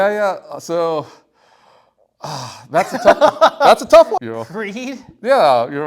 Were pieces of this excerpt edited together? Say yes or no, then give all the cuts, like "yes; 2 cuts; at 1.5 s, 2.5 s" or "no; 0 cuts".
yes; 1 cut; at 4.2 s